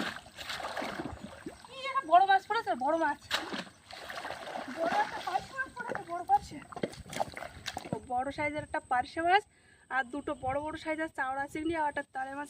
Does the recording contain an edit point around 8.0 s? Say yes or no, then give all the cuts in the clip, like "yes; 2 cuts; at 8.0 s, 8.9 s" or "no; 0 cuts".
yes; 1 cut; at 8.0 s